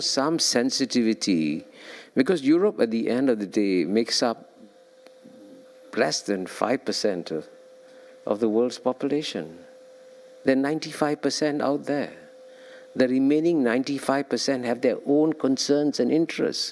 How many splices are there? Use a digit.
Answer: 0